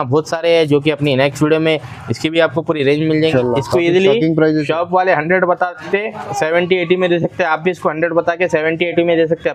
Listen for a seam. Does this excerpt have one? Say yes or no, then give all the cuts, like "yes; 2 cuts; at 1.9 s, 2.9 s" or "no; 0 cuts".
yes; 1 cut; at 3.3 s